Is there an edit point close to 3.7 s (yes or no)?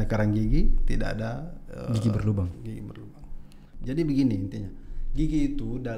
yes